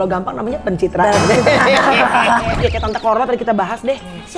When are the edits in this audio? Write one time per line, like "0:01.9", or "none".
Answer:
0:02.6